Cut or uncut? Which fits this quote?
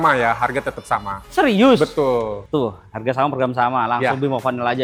uncut